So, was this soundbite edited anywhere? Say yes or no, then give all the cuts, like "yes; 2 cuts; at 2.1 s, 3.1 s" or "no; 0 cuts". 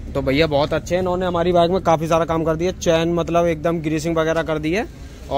no; 0 cuts